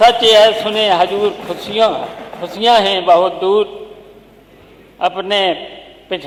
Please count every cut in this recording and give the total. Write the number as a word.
zero